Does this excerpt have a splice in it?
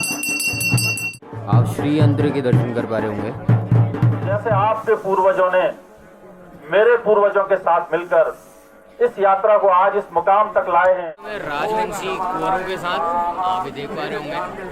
yes; 3 cuts; at 1.3 s, 4.3 s, 11.4 s

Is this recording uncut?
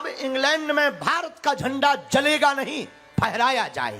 yes; 0 cuts

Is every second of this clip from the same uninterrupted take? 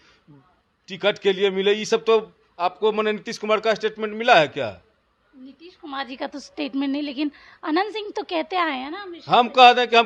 yes; 0 cuts

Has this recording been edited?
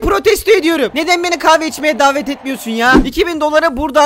yes; 1 cut; at 3.0 s

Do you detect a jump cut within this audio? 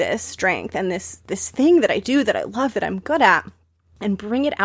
yes; 1 cut; at 1.1 s

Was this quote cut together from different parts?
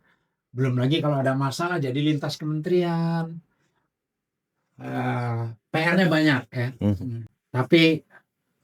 no; 0 cuts

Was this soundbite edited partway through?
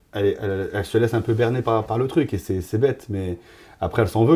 no; 0 cuts

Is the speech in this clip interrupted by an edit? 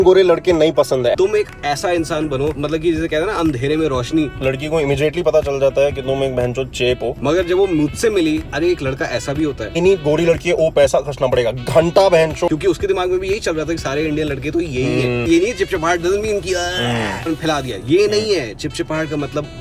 yes; 9 cuts; at 1.1 s, 2.6 s, 4.3 s, 7.2 s, 8.5 s, 9.7 s, 12.5 s, 15.3 s, 17.3 s

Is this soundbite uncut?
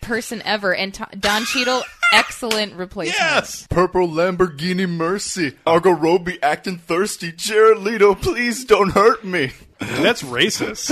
no; 3 cuts; at 3.6 s, 5.7 s, 9.7 s

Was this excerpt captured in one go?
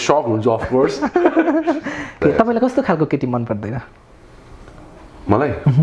no; 1 cut; at 2.2 s

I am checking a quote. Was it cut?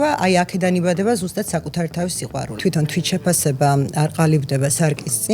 yes; 1 cut; at 2.5 s

